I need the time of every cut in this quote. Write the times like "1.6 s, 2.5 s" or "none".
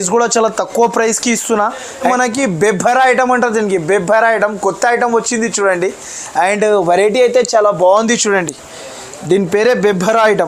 2.1 s